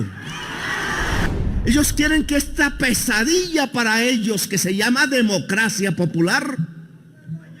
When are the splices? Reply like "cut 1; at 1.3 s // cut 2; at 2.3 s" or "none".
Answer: cut 1; at 1.2 s